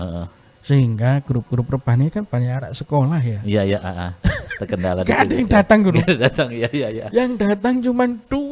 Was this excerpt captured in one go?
yes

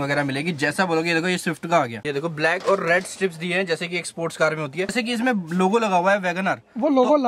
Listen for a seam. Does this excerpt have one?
yes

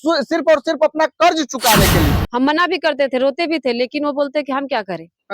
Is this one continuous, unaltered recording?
no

